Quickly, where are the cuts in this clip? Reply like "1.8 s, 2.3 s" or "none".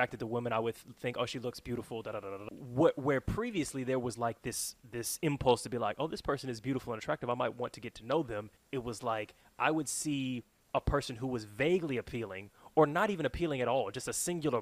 2.3 s, 8.6 s, 10.5 s